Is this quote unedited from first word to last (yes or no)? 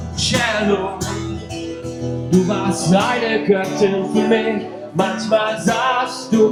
yes